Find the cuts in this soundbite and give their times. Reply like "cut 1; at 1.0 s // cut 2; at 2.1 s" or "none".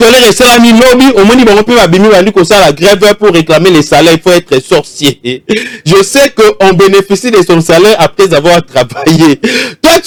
none